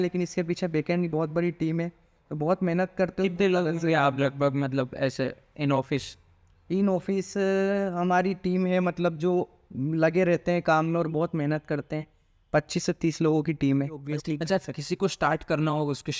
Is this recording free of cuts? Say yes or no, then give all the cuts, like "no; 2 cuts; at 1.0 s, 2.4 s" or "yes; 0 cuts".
no; 1 cut; at 14.0 s